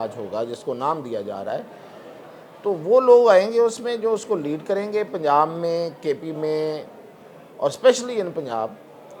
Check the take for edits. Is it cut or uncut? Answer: uncut